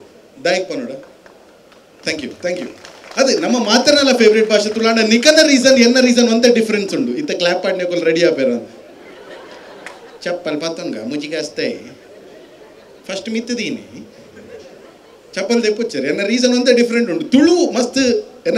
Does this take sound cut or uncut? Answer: uncut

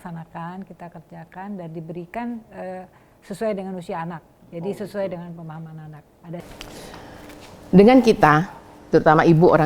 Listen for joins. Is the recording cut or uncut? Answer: cut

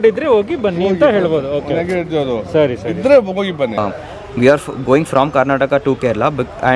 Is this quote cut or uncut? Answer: cut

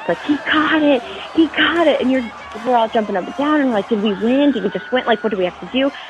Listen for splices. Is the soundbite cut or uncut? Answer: uncut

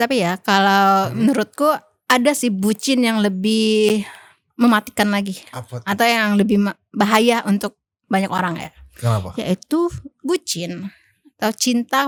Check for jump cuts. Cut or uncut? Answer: uncut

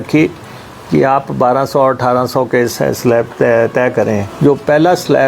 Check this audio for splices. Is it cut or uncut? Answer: cut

